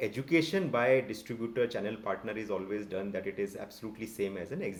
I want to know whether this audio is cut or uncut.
uncut